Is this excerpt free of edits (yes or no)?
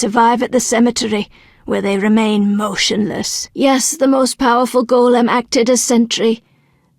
no